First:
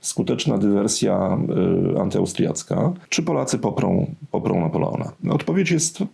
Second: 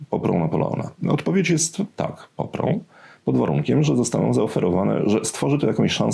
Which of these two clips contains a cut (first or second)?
first